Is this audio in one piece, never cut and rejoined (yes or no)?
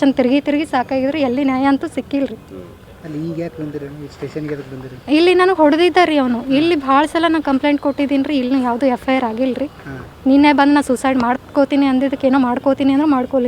yes